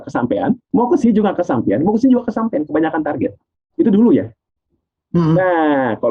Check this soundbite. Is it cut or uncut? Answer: uncut